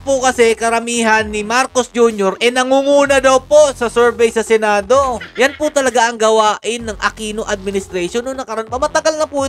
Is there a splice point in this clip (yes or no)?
yes